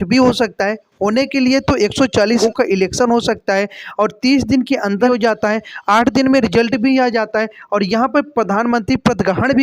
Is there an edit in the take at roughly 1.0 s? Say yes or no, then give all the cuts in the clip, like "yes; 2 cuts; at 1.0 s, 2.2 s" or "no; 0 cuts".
no; 2 cuts; at 2.4 s, 5.1 s